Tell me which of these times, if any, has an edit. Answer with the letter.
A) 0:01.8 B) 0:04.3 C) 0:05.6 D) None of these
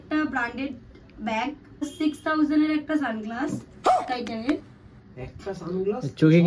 A